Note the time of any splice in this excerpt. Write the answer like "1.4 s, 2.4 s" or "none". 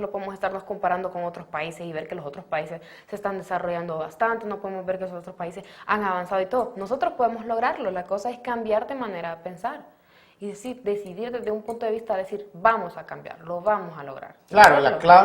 4.9 s